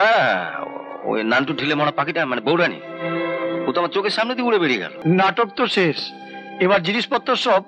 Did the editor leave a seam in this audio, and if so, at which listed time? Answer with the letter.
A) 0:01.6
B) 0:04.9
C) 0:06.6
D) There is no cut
B